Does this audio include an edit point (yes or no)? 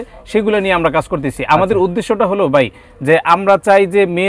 no